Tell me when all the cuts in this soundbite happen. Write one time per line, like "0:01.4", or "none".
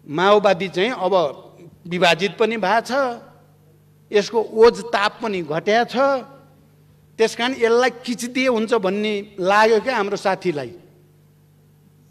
none